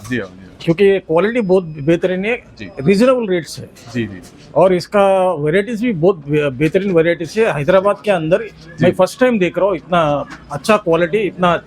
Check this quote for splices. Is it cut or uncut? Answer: uncut